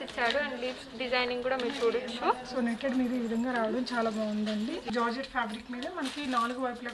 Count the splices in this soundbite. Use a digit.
1